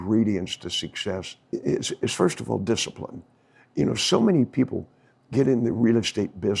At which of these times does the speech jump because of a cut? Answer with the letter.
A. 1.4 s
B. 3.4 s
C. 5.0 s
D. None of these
A